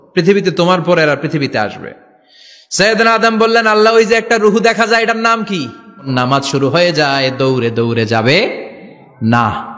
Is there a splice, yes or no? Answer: yes